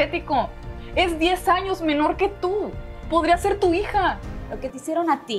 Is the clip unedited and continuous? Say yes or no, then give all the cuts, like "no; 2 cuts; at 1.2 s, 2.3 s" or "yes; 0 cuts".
no; 1 cut; at 4.3 s